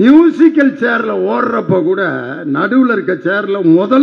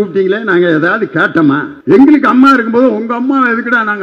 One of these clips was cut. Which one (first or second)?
second